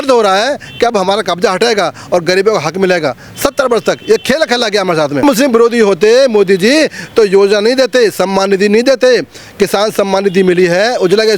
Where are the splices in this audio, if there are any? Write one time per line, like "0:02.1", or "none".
0:05.2